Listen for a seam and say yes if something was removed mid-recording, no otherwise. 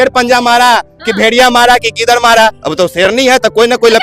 yes